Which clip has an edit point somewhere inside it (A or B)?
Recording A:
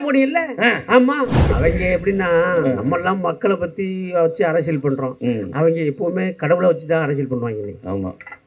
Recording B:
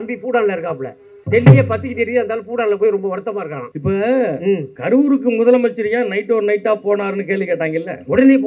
B